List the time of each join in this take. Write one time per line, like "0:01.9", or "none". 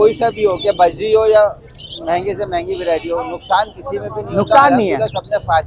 none